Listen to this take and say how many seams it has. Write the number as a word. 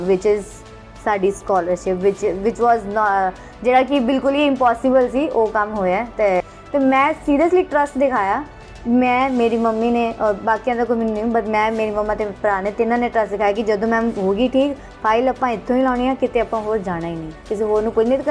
one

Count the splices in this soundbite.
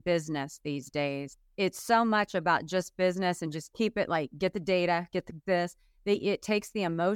one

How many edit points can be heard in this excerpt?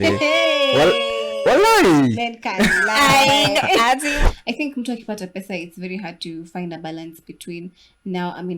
one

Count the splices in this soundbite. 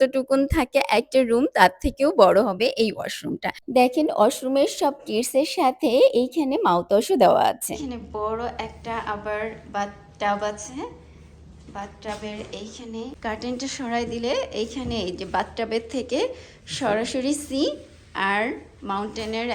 zero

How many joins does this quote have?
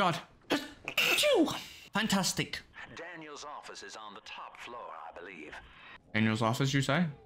zero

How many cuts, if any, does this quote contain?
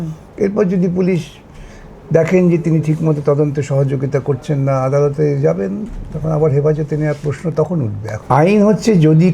one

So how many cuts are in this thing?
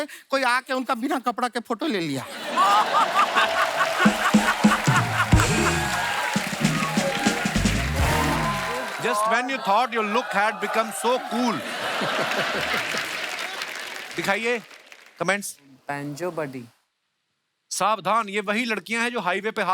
one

